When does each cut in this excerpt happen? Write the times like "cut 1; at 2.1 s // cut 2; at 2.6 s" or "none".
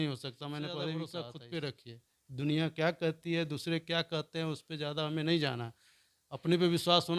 cut 1; at 1.1 s